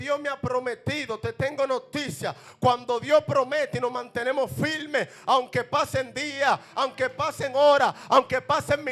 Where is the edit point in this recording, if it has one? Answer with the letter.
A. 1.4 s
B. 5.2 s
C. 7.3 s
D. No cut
D